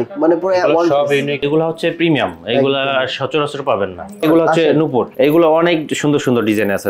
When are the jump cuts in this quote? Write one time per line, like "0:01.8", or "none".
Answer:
0:01.4
0:04.2